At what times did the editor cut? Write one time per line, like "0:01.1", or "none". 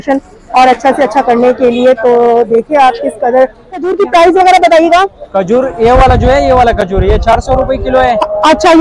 0:03.9